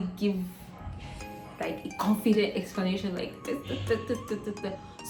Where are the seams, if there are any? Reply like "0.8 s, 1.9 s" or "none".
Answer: none